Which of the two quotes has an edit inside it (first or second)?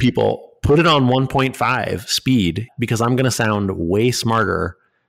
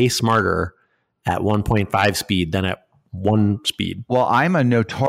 first